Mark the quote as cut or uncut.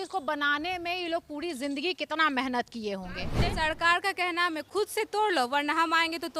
cut